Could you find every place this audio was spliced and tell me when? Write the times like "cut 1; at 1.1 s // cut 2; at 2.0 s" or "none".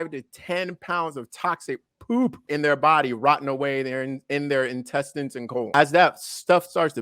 cut 1; at 2.4 s // cut 2; at 5.7 s